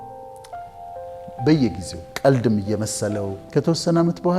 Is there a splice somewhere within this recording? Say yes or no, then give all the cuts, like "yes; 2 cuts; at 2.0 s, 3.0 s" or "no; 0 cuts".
yes; 1 cut; at 3.4 s